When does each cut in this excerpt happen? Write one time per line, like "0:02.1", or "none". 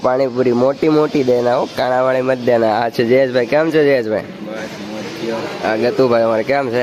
none